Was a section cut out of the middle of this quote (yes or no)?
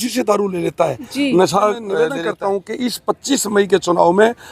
yes